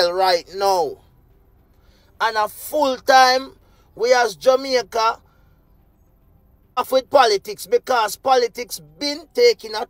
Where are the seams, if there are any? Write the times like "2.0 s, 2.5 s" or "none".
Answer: 6.9 s

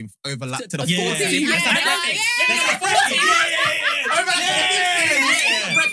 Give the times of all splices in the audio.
none

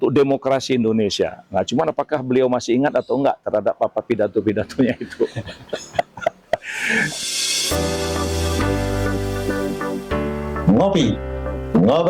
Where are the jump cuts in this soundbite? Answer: 7.1 s

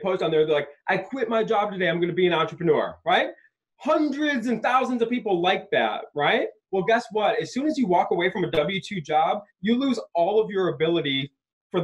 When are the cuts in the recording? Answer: 6.6 s

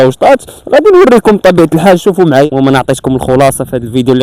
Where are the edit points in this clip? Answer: 2.5 s

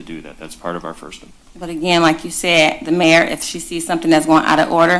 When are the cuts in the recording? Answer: none

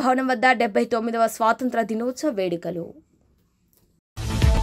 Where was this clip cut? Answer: none

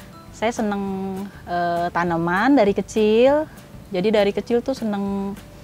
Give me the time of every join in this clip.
none

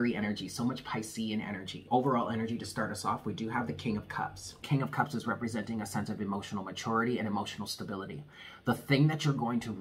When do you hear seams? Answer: 1.7 s, 4.6 s

